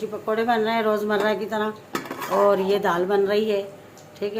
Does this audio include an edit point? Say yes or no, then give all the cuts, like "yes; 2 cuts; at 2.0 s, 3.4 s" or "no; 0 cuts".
no; 0 cuts